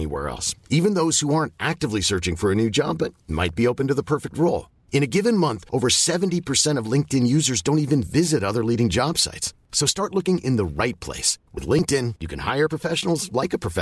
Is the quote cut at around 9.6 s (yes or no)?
no